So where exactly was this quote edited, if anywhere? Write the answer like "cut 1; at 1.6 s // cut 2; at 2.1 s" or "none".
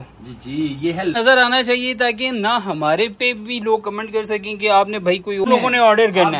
cut 1; at 1.2 s // cut 2; at 5.4 s